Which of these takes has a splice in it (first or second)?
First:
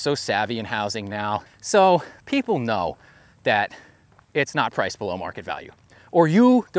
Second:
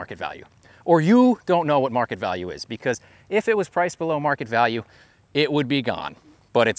first